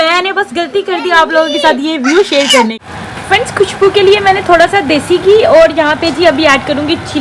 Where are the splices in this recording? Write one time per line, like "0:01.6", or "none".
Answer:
0:02.8